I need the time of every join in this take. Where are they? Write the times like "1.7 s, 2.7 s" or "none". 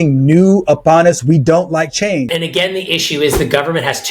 2.3 s